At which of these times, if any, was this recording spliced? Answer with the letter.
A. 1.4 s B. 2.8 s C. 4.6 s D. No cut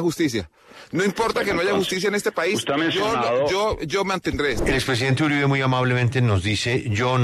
C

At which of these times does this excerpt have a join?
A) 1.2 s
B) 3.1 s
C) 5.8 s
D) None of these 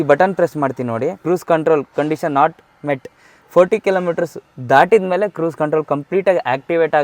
A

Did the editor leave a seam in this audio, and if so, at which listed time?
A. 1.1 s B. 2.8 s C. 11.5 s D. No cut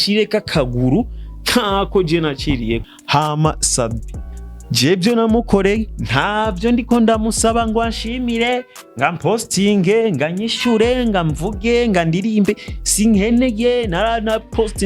B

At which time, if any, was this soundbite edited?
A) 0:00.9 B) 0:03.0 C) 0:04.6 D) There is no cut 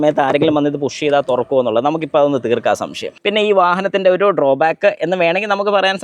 B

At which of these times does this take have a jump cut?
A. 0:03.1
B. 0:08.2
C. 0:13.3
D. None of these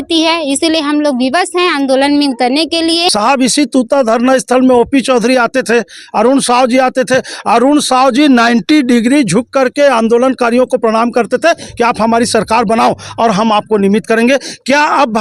A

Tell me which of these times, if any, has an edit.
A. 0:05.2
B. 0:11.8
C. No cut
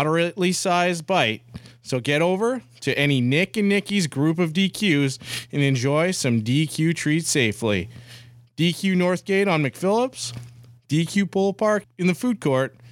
B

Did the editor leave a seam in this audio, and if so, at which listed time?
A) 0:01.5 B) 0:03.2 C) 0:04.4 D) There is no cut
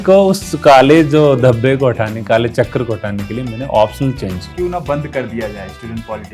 C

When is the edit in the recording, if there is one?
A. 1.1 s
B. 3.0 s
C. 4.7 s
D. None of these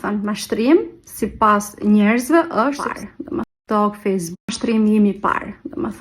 B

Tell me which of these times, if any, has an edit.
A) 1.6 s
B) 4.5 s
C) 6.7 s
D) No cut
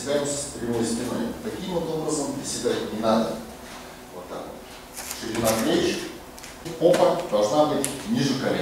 C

